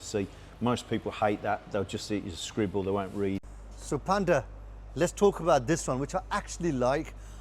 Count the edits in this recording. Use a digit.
1